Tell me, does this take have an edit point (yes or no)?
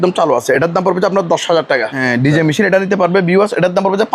yes